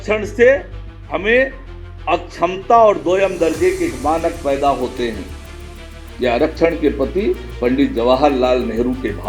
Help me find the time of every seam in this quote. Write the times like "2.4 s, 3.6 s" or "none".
none